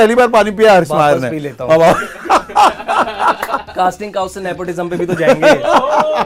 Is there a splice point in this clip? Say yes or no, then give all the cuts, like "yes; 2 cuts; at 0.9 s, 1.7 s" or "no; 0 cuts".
no; 0 cuts